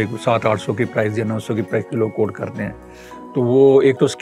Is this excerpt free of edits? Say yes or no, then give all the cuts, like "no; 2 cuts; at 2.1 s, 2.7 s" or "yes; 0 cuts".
yes; 0 cuts